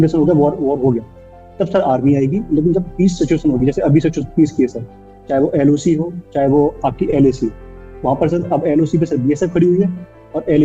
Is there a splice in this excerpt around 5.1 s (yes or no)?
no